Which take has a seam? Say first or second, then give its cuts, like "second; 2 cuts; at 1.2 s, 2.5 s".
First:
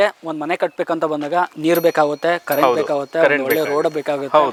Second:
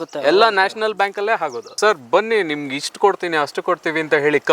second; 1 cut; at 1.7 s